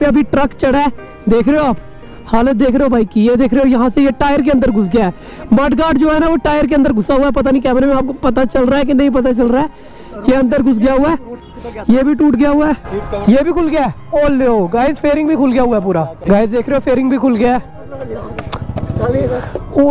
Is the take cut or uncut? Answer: uncut